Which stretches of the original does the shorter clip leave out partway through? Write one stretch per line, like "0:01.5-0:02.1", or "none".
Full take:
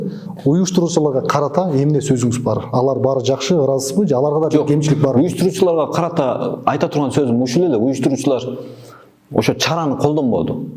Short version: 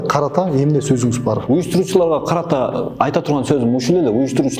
0:02.7-0:05.1